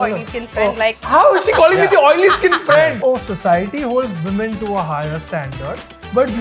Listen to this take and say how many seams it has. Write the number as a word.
two